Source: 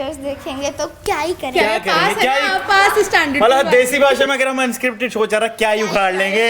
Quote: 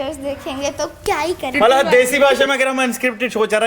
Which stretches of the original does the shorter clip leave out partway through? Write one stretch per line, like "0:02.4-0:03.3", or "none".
0:01.5-0:03.3